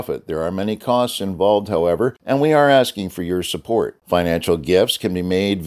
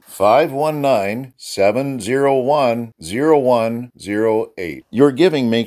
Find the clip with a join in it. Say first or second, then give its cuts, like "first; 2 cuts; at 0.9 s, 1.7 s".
first; 1 cut; at 2.2 s